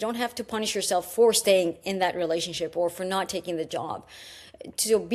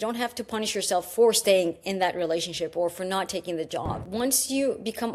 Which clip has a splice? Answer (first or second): second